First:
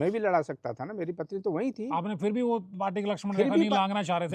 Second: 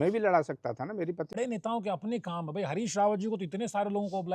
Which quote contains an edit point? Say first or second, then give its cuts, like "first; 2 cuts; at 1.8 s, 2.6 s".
second; 1 cut; at 1.4 s